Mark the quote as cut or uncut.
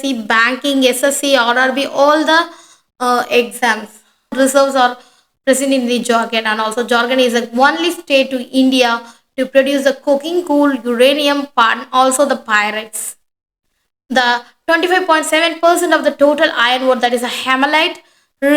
cut